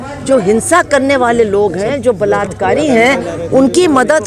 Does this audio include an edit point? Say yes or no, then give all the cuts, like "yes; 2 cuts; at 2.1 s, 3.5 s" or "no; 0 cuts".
no; 0 cuts